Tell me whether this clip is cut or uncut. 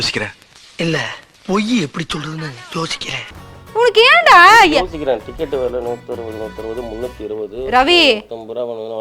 cut